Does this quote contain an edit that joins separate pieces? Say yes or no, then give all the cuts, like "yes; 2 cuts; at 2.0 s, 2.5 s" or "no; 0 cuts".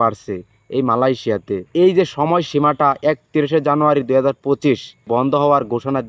yes; 2 cuts; at 1.7 s, 5.1 s